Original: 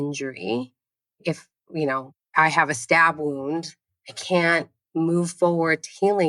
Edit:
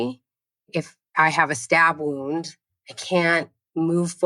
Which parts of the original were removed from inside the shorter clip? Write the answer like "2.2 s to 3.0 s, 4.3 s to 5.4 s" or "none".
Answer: 1.5 s to 2.2 s